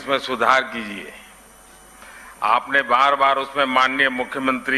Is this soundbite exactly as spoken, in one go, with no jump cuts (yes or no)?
yes